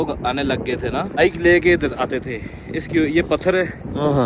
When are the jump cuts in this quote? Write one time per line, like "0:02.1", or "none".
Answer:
0:01.2